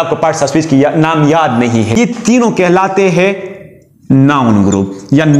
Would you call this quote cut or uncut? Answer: cut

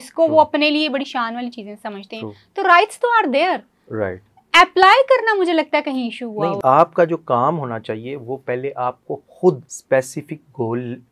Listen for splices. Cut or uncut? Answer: cut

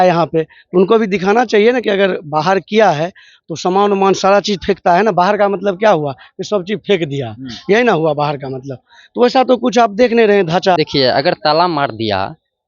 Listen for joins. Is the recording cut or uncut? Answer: cut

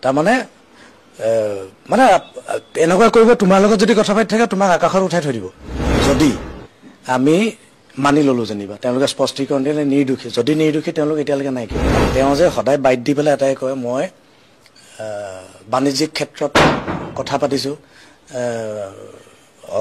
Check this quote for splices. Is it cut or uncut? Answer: cut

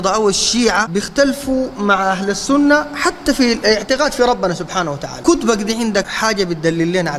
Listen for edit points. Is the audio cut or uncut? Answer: cut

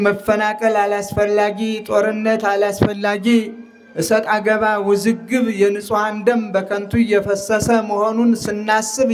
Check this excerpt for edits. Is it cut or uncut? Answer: uncut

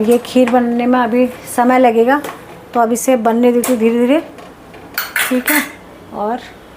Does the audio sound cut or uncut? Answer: uncut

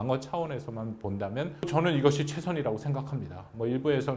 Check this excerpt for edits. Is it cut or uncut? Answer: cut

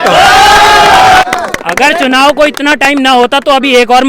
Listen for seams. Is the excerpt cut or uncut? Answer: cut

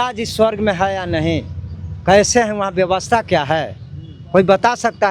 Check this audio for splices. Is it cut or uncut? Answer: uncut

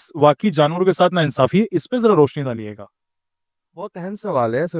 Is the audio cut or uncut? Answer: uncut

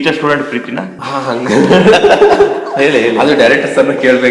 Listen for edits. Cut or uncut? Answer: cut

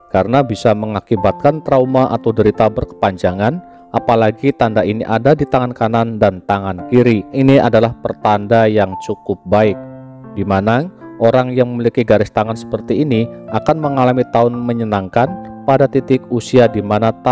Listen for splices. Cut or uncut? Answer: cut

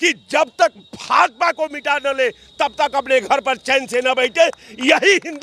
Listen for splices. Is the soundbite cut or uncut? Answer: uncut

